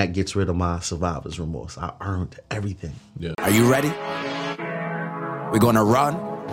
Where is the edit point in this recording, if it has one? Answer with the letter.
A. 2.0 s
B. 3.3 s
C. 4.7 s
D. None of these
B